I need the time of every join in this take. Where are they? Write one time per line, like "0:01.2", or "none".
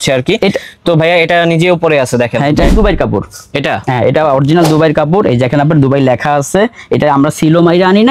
0:02.7